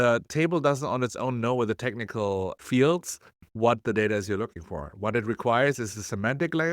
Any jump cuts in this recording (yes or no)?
yes